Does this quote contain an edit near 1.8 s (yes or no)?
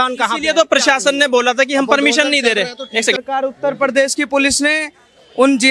no